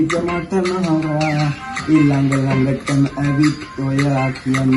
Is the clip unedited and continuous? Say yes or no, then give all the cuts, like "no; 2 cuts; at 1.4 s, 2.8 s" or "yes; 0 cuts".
yes; 0 cuts